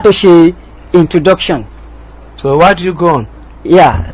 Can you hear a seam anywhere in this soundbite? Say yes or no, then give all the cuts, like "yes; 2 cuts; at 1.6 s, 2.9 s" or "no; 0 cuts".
no; 0 cuts